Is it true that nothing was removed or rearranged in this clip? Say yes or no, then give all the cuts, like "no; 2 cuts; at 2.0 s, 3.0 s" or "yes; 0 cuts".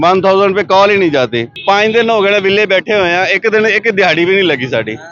no; 1 cut; at 1.5 s